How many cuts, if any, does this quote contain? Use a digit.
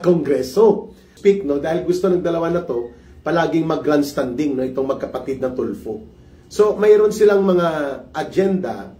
1